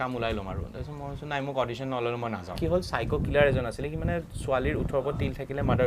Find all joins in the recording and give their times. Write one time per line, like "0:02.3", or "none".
0:02.6